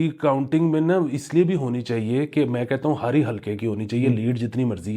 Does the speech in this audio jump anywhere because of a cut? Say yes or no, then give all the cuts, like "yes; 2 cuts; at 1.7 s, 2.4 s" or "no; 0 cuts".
no; 0 cuts